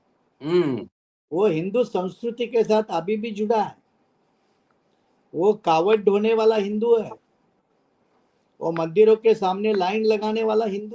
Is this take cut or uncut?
uncut